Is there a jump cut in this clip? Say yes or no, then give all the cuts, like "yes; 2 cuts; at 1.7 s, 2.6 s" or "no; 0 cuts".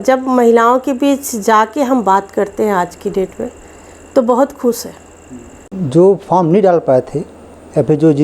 yes; 1 cut; at 5.7 s